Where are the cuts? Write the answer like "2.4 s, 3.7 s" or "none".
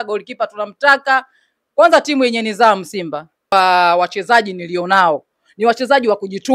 3.5 s